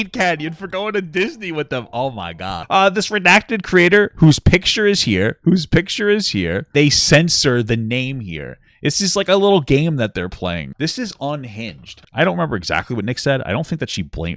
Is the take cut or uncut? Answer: cut